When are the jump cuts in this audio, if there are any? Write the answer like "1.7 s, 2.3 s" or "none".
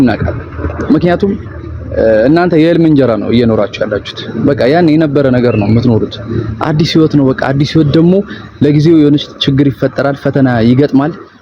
none